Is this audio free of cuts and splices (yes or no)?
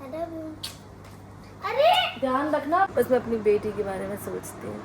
no